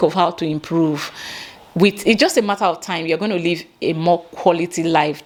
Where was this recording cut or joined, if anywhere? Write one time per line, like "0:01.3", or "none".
none